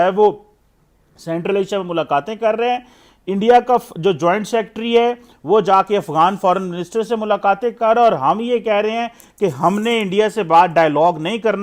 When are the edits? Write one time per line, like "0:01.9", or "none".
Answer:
none

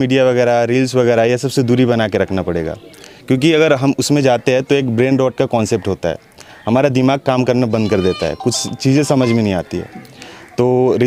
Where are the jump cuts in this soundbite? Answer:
none

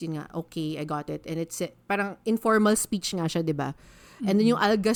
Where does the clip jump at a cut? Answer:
none

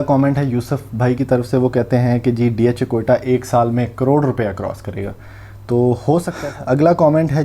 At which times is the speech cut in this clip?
0:06.3

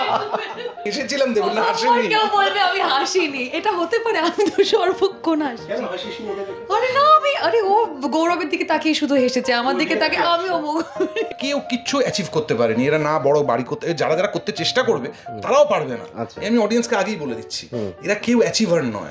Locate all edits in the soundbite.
0:00.9
0:11.3

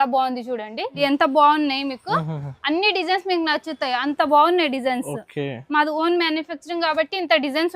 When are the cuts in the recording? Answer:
0:01.0

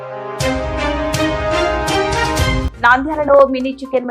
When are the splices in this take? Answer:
0:02.7

